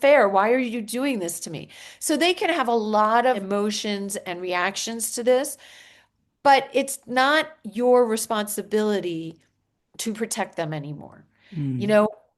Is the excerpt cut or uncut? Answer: cut